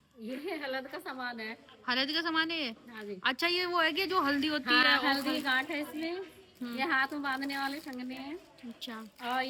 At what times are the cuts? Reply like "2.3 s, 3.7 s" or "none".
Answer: none